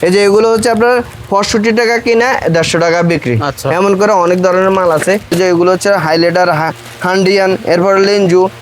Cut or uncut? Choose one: cut